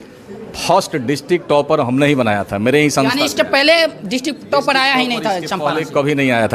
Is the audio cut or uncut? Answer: uncut